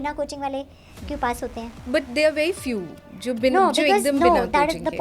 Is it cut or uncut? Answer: cut